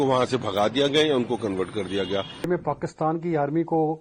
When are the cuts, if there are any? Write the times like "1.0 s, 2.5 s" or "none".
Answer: 2.5 s